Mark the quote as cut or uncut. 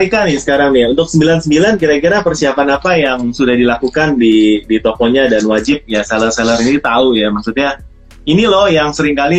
uncut